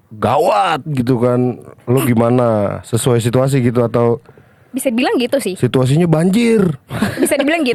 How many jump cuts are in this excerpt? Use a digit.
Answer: 0